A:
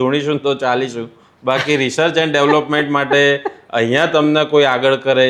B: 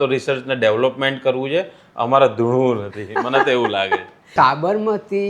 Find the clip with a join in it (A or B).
B